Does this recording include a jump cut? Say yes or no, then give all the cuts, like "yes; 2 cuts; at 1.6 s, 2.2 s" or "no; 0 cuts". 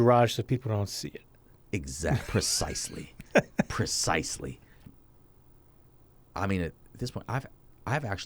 yes; 1 cut; at 5.0 s